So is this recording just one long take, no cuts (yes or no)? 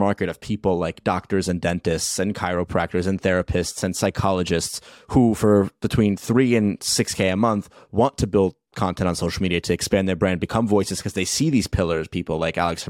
yes